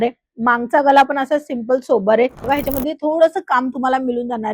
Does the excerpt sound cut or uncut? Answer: cut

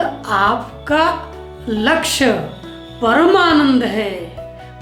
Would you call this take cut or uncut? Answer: uncut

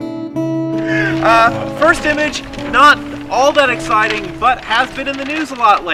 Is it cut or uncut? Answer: uncut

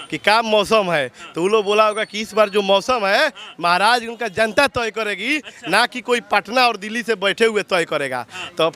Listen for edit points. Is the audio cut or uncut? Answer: uncut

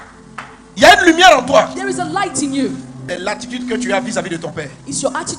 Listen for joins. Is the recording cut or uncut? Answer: cut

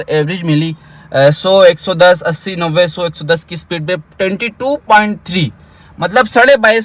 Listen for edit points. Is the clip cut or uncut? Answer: uncut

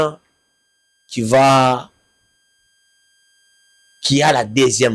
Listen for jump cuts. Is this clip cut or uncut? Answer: uncut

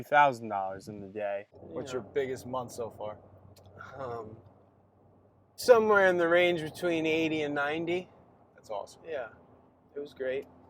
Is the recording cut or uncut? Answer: cut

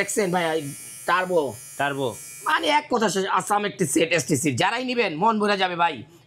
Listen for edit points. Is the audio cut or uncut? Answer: uncut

